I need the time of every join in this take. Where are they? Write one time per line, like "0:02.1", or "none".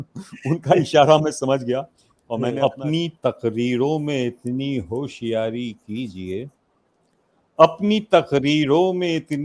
0:02.6

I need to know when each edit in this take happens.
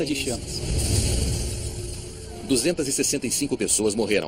none

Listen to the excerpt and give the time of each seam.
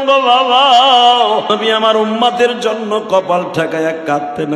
0:01.5

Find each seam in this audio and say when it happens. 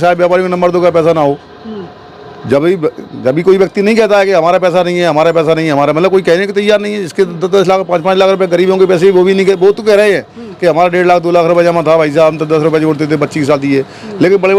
none

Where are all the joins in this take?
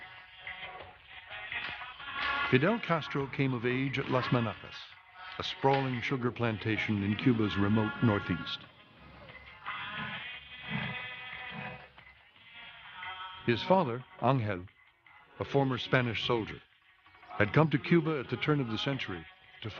0:15.2

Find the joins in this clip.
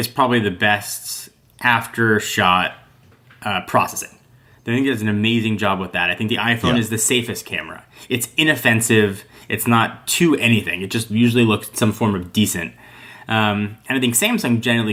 none

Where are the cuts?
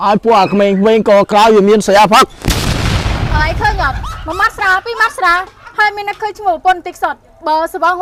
none

